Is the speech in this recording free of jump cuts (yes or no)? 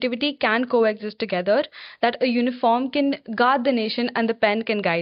yes